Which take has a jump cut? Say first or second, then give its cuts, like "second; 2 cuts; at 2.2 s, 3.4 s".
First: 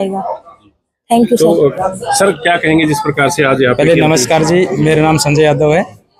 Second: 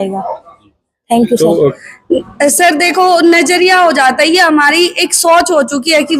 second; 1 cut; at 1.8 s